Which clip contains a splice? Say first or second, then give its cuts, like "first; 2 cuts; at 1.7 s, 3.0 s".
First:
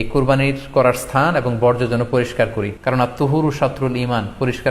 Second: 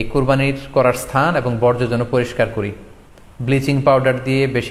first; 1 cut; at 2.7 s